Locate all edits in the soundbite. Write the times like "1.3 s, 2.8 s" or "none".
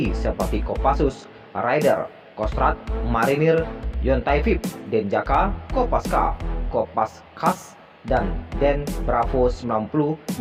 none